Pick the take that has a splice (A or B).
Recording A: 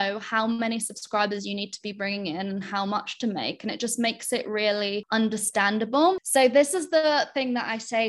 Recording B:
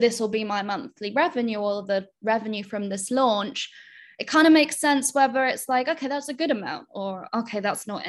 A